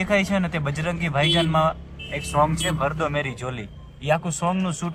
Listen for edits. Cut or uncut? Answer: uncut